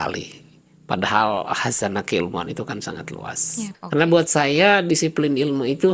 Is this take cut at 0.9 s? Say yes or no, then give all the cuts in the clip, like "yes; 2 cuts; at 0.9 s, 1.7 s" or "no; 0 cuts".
no; 1 cut; at 3.7 s